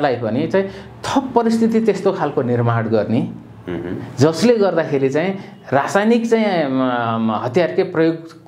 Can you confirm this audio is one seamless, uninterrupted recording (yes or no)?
yes